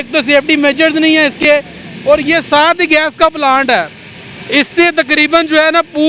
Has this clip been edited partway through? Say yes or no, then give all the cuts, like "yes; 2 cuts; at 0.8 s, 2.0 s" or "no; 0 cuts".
no; 0 cuts